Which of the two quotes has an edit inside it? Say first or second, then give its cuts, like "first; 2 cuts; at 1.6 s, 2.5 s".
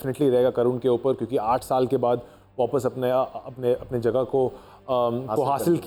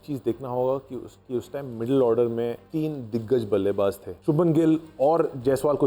second; 2 cuts; at 2.7 s, 4.1 s